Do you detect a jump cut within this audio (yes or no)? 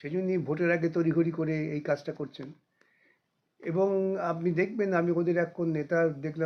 no